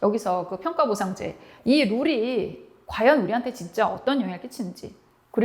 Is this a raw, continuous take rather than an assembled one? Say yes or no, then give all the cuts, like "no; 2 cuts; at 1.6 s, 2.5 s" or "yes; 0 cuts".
no; 1 cut; at 1.5 s